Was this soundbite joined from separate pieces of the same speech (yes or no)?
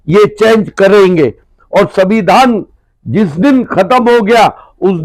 no